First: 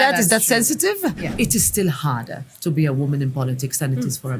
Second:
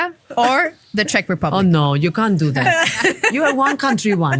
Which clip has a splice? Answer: first; 1 cut; at 1.2 s

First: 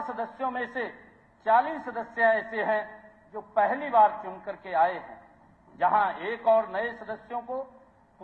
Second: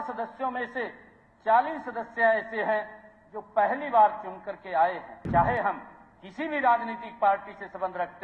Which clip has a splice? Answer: second; 1 cut; at 5.1 s

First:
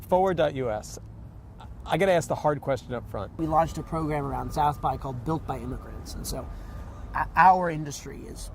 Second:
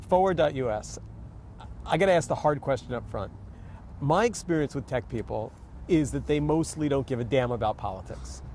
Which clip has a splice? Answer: first; 1 cut; at 3.3 s

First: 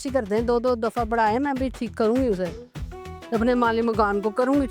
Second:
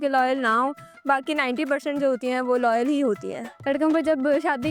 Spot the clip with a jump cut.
second; 1 cut; at 3.7 s

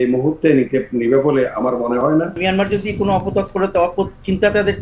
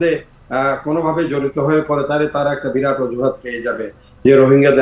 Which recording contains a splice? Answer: first; 1 cut; at 2.2 s

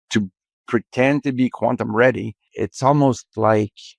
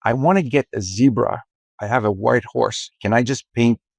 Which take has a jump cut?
first; 1 cut; at 2.5 s

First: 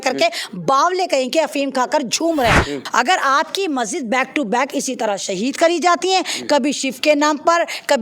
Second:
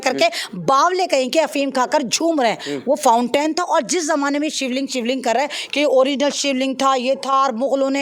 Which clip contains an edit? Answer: first; 1 cut; at 2.8 s

